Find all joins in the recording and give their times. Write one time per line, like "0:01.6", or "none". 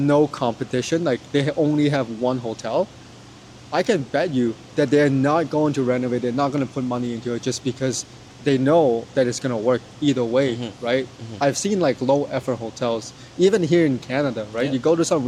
none